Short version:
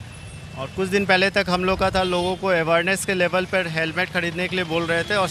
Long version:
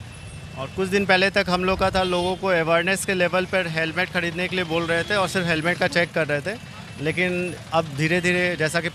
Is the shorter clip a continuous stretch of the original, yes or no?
yes